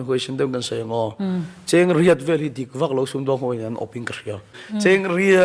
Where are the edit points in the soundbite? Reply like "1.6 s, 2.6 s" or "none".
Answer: 4.5 s